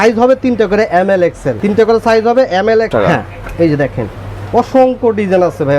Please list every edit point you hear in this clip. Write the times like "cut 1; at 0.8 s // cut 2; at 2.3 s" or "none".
cut 1; at 1.5 s // cut 2; at 2.9 s